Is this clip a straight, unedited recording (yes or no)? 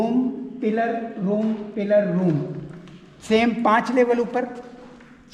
yes